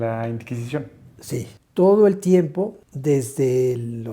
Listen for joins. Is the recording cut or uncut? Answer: cut